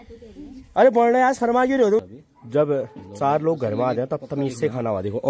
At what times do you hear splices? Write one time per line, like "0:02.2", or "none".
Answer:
0:02.0

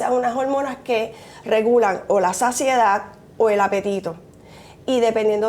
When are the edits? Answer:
none

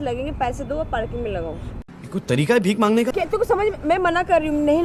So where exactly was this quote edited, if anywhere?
0:01.7
0:03.1

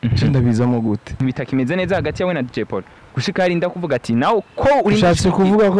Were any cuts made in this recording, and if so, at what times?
0:01.2

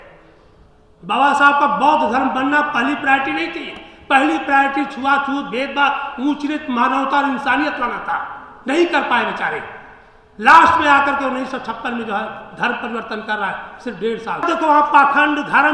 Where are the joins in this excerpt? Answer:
0:14.4

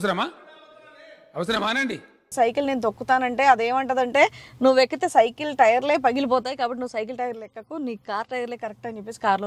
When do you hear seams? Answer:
0:02.2

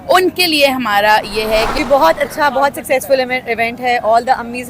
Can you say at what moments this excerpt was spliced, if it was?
0:01.7

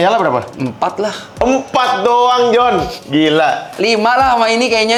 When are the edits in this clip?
none

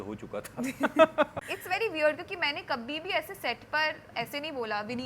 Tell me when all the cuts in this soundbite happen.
0:01.5

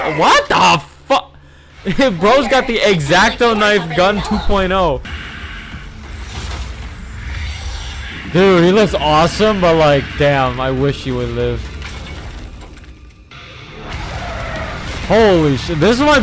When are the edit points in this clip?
0:05.1

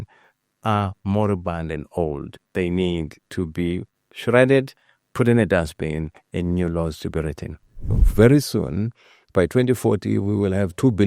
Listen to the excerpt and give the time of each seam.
0:08.0

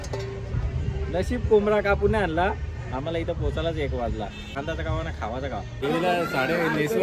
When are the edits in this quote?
0:04.6
0:05.8

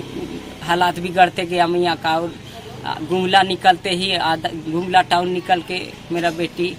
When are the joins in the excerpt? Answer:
none

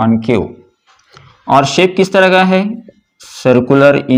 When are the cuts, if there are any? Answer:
none

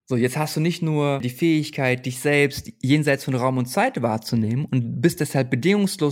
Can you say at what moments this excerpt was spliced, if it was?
0:01.3

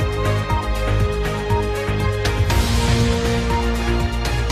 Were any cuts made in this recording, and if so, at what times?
0:02.3

